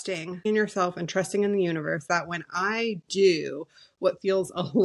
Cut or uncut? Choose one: uncut